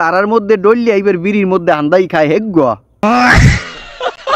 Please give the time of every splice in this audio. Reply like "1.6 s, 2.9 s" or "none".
2.9 s